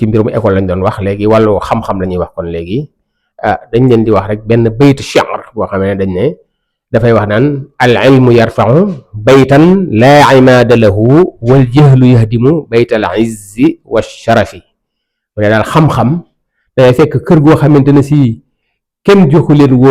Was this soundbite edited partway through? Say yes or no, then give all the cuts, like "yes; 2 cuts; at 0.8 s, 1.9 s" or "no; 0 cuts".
no; 0 cuts